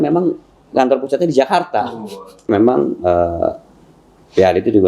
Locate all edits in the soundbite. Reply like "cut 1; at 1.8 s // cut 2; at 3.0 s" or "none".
cut 1; at 2.5 s